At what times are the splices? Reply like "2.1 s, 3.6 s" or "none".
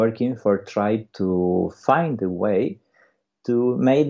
1.1 s